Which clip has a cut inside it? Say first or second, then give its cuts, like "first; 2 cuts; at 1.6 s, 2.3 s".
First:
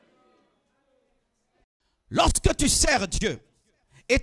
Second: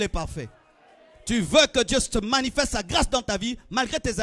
first; 1 cut; at 1.7 s